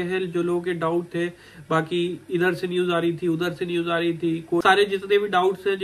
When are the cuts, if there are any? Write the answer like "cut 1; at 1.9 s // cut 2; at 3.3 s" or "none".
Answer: cut 1; at 4.6 s